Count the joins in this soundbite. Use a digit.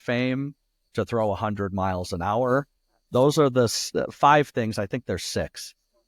0